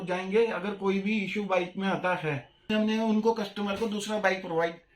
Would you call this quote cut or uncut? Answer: cut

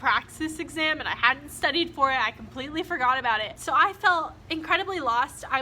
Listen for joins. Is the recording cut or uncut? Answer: cut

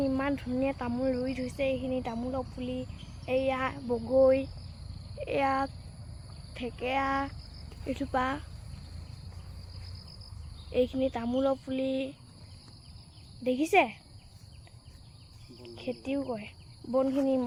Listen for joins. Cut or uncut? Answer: uncut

